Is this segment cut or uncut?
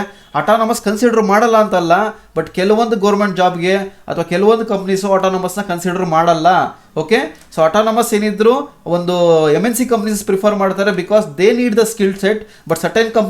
uncut